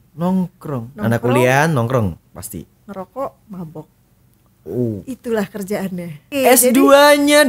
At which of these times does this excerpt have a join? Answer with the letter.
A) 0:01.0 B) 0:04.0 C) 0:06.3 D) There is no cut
C